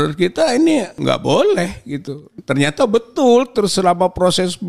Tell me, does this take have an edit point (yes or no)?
yes